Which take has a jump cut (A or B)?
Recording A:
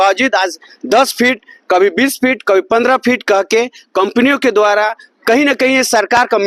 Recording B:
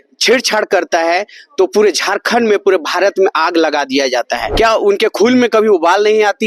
B